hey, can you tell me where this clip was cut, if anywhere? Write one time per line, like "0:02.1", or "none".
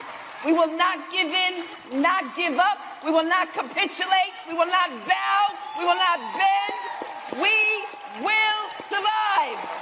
none